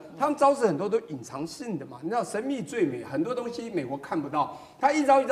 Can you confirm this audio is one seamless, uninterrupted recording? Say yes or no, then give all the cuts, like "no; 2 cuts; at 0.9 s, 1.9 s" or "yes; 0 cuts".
yes; 0 cuts